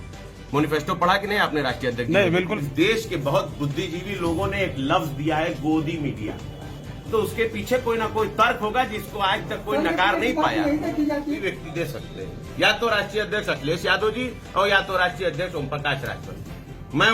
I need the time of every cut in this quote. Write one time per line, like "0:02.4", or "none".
0:02.5
0:11.4

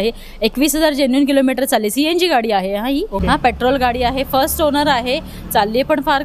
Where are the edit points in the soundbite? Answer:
0:03.2

